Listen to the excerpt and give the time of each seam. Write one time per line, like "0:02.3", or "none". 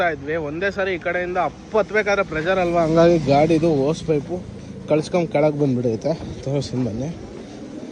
none